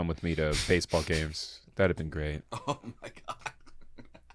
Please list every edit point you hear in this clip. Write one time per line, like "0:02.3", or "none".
none